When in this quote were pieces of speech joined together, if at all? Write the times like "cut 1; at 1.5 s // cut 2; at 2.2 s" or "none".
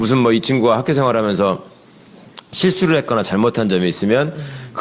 none